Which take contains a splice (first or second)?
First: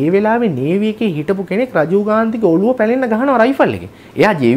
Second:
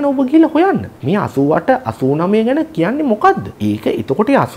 second